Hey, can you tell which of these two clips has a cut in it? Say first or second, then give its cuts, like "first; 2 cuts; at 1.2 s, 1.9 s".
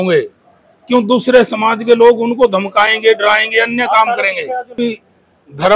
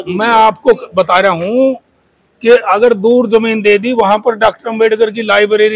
first; 1 cut; at 4.7 s